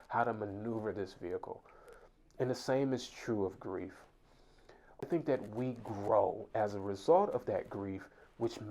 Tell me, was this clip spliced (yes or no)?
yes